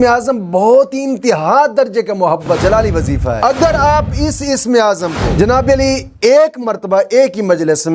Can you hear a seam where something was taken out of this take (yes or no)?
yes